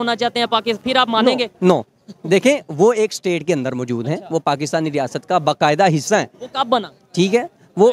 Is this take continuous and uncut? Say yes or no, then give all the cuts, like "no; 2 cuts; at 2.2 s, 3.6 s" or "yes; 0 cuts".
yes; 0 cuts